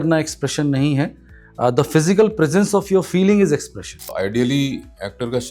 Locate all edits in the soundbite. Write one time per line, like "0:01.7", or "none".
0:04.1